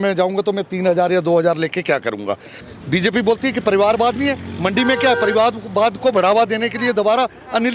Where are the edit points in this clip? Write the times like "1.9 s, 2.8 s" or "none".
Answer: 2.6 s